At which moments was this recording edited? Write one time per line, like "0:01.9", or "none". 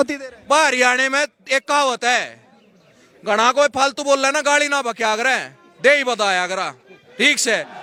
none